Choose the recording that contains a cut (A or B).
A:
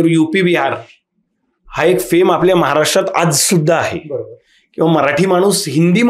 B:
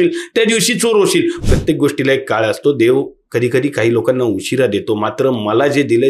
B